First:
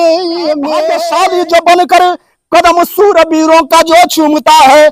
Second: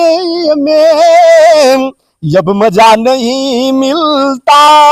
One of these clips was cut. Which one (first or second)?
first